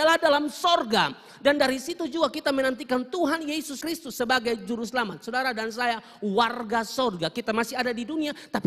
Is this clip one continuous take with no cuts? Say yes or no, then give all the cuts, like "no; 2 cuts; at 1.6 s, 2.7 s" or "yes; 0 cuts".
yes; 0 cuts